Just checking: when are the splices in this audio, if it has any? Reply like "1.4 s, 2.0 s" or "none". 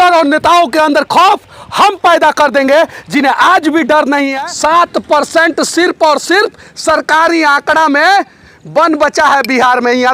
4.3 s